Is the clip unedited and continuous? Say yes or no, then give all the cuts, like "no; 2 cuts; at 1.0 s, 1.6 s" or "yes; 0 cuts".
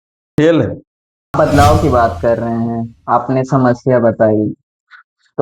no; 1 cut; at 1.3 s